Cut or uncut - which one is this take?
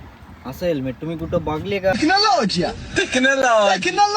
cut